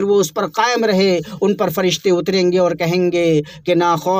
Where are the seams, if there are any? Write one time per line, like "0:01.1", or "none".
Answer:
none